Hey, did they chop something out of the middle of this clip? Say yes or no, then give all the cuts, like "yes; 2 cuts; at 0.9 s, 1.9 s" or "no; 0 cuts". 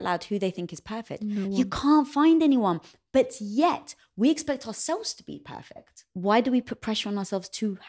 yes; 2 cuts; at 1.1 s, 6.0 s